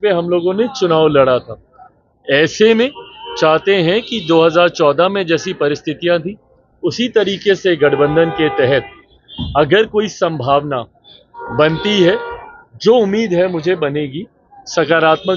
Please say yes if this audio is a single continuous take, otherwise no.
yes